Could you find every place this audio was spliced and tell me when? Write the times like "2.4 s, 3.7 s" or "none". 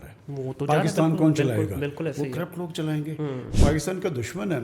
3.5 s

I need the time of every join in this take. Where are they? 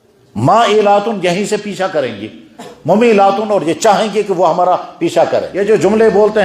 5.5 s

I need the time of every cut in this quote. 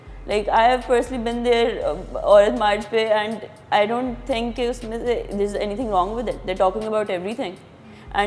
none

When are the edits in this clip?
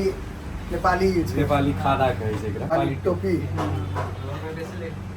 2.7 s

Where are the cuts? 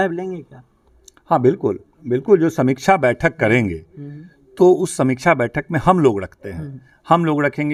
none

